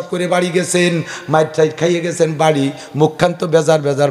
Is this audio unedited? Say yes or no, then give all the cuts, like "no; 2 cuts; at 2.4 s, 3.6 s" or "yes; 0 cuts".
yes; 0 cuts